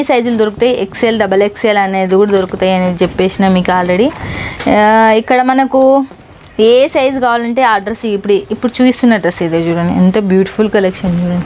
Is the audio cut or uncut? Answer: uncut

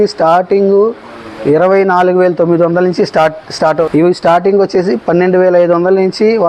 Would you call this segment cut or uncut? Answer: cut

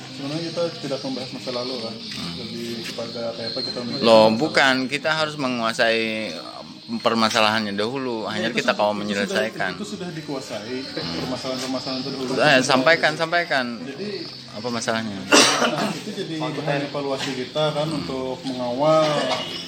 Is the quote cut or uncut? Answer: uncut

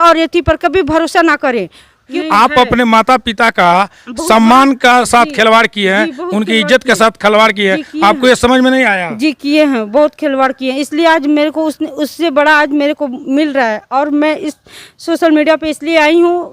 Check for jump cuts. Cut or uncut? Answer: cut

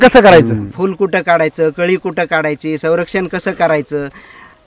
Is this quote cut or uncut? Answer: uncut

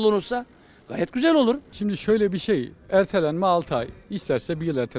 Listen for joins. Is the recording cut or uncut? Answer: cut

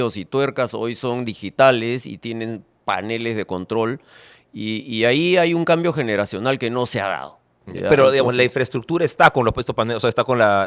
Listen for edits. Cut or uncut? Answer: uncut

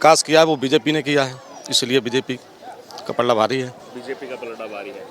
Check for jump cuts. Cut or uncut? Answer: uncut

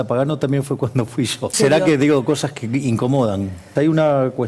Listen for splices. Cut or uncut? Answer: cut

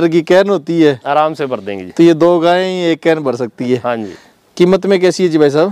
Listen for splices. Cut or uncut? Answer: uncut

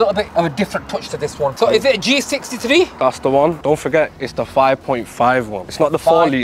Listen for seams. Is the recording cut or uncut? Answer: cut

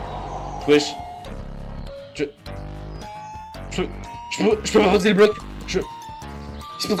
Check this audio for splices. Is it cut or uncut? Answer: uncut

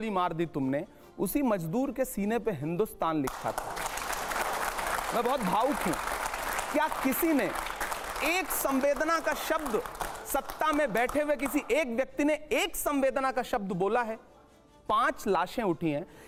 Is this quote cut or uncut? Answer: uncut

